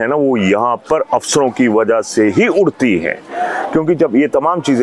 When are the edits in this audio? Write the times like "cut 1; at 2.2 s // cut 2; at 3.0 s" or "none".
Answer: none